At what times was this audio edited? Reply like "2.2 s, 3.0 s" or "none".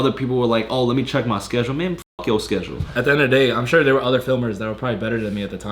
2.9 s